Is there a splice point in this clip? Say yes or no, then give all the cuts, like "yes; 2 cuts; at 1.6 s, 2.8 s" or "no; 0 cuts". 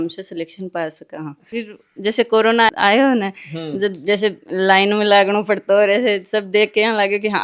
yes; 1 cut; at 1.4 s